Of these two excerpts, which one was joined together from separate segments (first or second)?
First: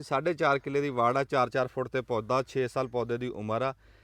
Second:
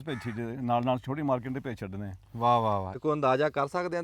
second